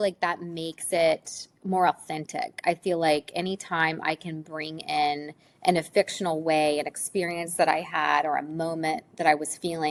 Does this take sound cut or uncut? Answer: uncut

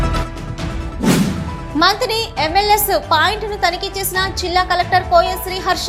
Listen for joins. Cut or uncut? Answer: uncut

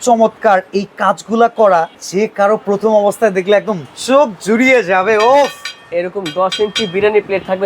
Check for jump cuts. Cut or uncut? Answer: cut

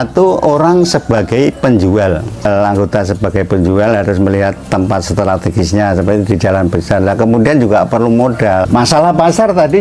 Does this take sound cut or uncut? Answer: cut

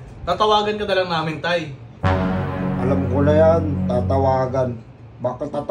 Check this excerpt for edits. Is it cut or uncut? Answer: uncut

